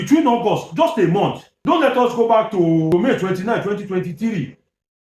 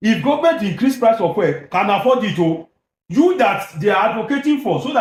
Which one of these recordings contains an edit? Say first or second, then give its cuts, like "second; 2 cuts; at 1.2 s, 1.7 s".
first; 2 cuts; at 1.5 s, 2.9 s